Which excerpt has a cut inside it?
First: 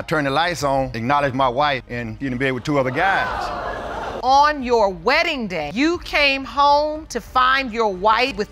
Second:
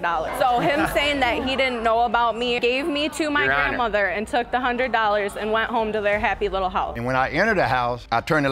second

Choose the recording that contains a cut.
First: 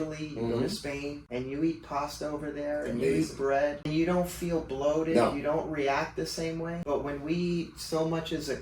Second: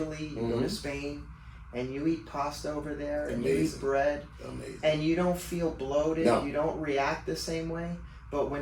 first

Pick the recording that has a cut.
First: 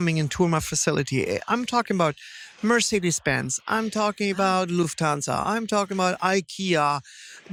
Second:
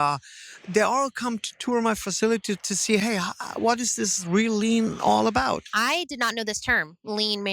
second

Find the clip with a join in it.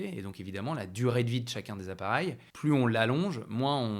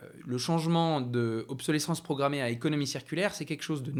first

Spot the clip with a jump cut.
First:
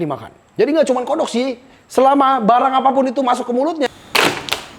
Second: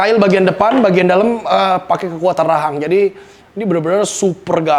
first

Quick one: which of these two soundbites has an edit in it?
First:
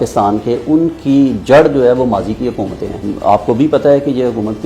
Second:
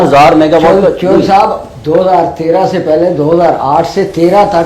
first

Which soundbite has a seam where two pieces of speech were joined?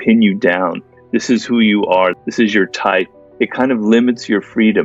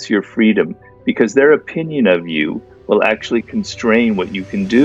first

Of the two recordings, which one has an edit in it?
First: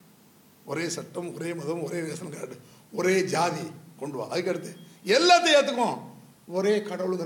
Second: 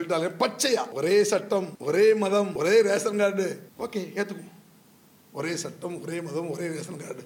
second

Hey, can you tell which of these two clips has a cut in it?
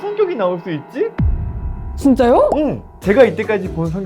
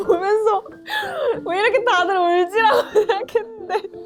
first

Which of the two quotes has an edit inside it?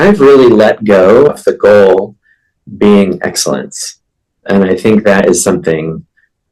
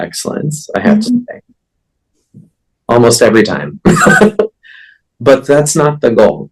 first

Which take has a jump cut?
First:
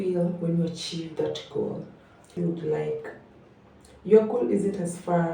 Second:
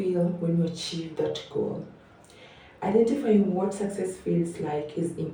first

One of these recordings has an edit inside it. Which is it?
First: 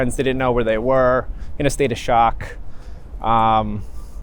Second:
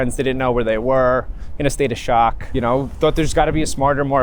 second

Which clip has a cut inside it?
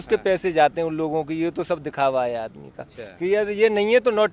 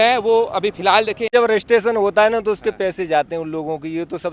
second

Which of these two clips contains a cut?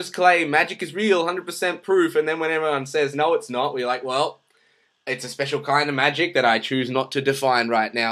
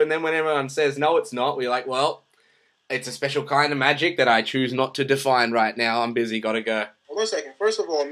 second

